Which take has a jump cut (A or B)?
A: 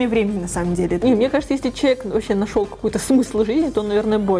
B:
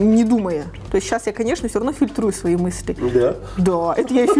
A